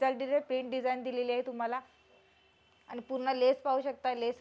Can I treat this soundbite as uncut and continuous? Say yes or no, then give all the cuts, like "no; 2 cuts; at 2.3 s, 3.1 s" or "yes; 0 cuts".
yes; 0 cuts